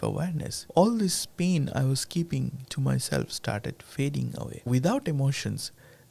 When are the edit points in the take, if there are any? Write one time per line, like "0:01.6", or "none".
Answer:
0:04.7